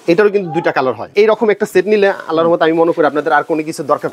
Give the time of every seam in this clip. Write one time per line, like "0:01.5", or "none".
0:01.0